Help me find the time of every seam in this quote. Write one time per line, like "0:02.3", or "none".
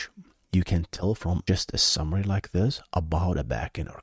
0:01.4